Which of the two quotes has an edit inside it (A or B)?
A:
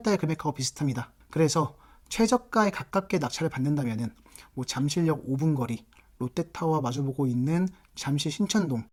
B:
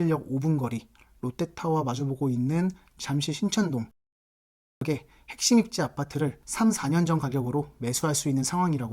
B